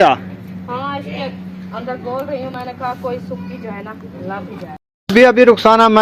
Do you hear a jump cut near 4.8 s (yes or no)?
yes